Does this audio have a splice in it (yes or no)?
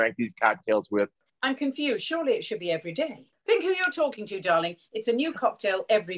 yes